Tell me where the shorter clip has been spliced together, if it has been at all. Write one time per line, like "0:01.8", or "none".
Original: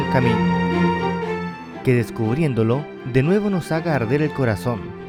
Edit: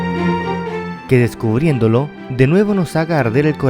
0:00.9